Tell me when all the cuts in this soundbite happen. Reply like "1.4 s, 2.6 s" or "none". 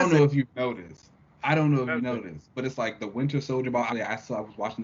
3.9 s